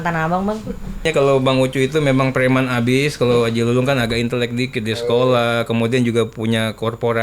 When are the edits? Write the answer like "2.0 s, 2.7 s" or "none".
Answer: 1.0 s

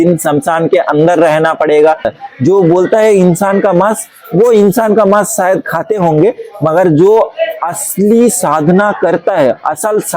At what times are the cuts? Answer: 2.2 s

